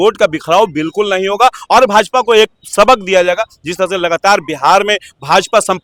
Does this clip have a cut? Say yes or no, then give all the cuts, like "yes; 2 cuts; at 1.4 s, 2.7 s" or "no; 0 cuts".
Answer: no; 0 cuts